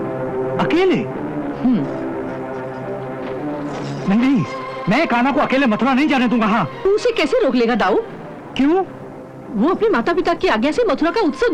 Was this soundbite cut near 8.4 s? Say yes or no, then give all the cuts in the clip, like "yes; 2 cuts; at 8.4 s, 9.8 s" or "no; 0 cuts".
no; 0 cuts